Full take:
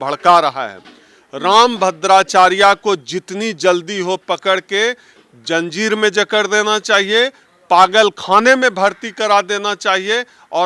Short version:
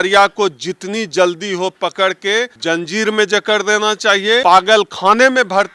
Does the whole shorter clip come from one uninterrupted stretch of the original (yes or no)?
no